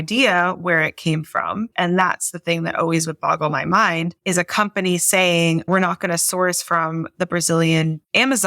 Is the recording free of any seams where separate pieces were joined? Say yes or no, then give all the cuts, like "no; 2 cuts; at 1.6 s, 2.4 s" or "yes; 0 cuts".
no; 2 cuts; at 1.7 s, 5.7 s